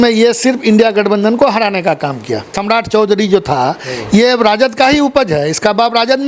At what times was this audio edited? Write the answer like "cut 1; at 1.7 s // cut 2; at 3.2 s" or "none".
cut 1; at 2.6 s